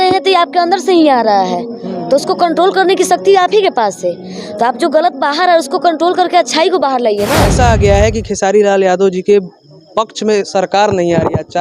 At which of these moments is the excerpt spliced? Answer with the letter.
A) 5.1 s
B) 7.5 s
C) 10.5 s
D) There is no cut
B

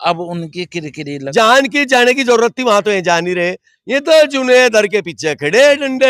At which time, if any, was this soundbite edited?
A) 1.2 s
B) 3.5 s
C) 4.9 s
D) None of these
A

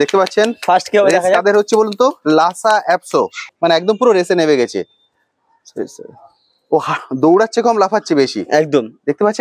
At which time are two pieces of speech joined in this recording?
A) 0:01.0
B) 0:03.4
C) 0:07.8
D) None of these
B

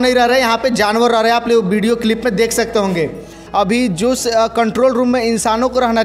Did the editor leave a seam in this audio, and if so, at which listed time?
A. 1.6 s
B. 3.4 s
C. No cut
B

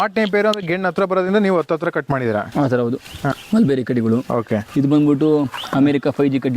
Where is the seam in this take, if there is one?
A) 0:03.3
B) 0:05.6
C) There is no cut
A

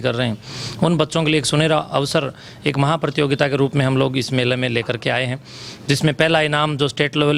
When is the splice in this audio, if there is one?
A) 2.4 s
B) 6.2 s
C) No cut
C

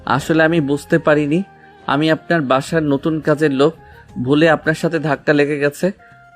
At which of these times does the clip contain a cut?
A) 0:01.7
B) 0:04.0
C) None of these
C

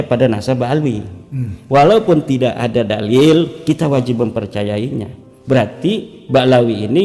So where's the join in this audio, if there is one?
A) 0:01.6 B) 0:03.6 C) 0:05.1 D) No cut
B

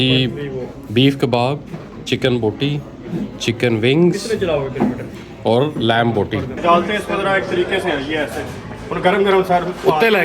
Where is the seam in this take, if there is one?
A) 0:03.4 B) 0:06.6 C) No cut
B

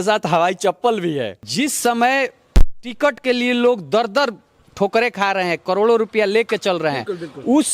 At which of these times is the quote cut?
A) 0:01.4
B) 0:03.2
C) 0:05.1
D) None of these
A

